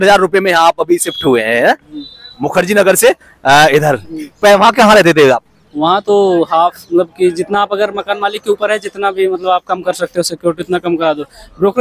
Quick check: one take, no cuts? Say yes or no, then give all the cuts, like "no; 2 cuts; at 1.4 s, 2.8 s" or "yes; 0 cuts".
yes; 0 cuts